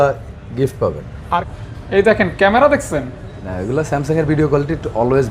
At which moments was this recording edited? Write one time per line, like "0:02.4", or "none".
0:01.5